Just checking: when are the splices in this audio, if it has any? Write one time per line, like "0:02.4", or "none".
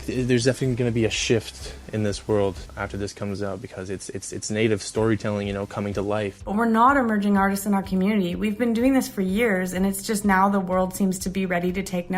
0:06.4

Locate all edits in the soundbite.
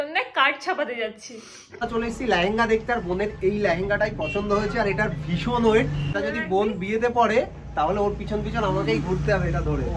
0:01.8
0:06.1

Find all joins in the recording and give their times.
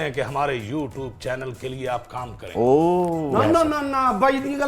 none

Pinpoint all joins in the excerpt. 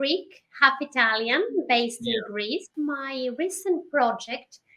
0:02.7

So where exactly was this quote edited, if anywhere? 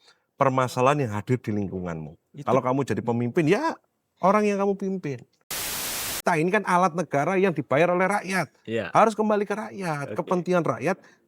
0:05.8

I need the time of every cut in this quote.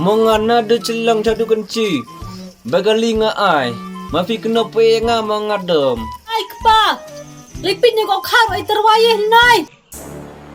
0:06.5

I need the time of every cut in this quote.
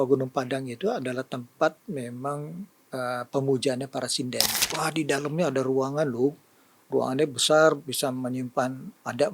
0:04.6

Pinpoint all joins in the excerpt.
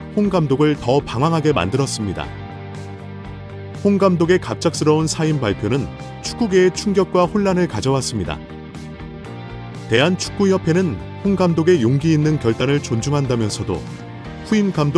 0:08.4
0:09.7

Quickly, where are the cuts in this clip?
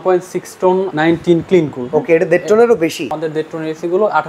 0:00.9
0:03.2

